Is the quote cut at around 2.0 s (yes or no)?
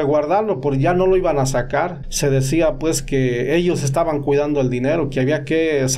yes